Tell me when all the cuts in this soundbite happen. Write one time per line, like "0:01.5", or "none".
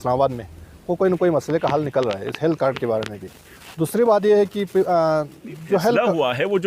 none